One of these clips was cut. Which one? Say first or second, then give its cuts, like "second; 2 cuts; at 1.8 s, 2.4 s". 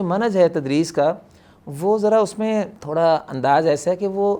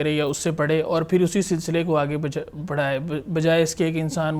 first; 1 cut; at 2.8 s